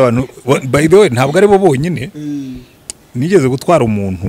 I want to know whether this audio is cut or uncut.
uncut